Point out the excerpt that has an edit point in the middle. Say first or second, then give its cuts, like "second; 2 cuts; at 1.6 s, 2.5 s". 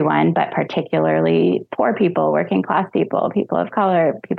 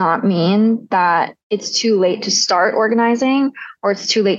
second; 1 cut; at 1.4 s